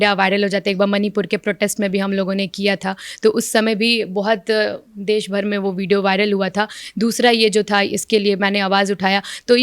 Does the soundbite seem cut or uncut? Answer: uncut